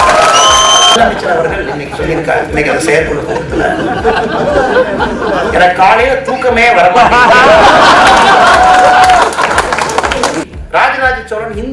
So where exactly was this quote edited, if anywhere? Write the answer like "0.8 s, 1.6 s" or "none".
1.0 s, 10.4 s